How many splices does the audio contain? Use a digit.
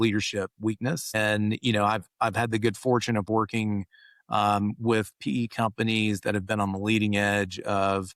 1